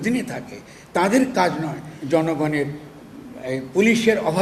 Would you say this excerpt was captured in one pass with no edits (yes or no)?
yes